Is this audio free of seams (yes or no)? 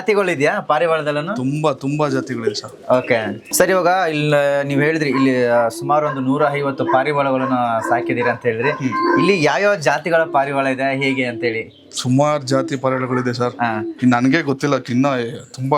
yes